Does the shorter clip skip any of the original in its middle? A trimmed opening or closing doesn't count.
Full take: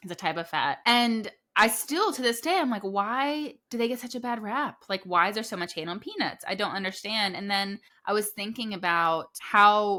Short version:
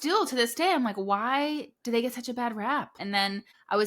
yes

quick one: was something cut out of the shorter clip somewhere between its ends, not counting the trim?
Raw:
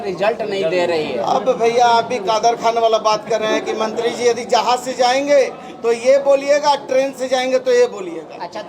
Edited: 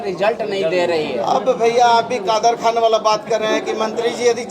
no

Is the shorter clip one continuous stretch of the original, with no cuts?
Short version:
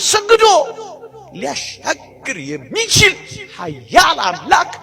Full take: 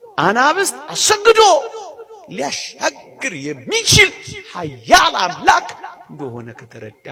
yes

